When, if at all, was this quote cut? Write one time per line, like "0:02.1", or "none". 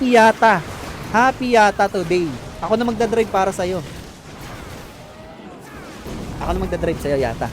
0:06.1